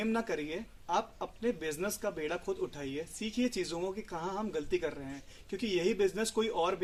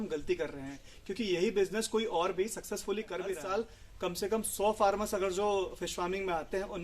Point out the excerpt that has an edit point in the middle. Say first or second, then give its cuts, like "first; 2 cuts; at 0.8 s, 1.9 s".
second; 1 cut; at 3.4 s